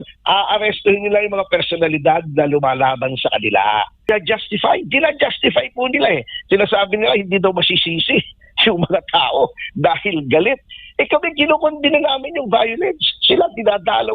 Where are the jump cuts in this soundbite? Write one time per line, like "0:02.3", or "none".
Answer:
0:04.0